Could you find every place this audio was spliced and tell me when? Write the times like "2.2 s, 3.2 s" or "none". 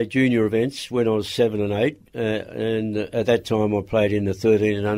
none